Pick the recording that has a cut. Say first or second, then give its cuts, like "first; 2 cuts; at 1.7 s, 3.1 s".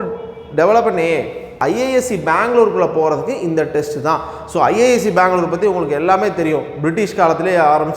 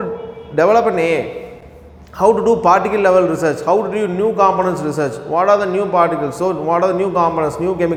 first; 1 cut; at 1.5 s